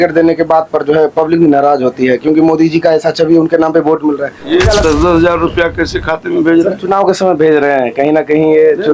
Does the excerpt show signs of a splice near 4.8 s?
yes; 1 cut; at 4.8 s

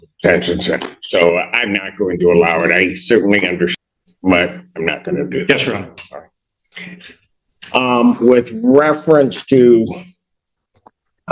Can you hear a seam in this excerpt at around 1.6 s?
no; 1 cut; at 3.7 s

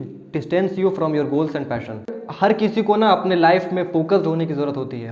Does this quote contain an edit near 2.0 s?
yes; 1 cut; at 2.0 s

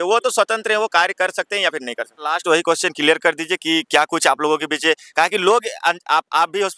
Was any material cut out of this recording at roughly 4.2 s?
no; 1 cut; at 2.3 s

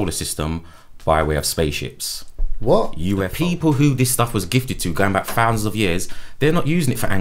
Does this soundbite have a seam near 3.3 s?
yes; 1 cut; at 3.3 s

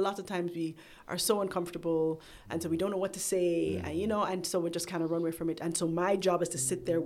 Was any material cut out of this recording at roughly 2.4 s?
no; 0 cuts

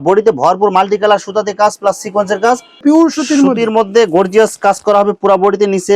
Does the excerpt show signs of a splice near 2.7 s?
yes; 1 cut; at 2.7 s

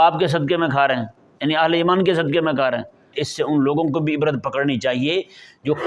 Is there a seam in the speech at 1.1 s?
no; 1 cut; at 3.1 s

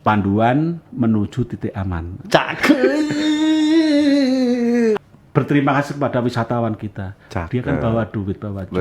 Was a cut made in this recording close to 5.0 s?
yes; 1 cut; at 5.0 s

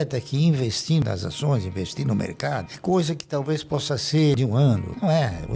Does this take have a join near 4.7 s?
yes; 2 cuts; at 1.0 s, 4.7 s

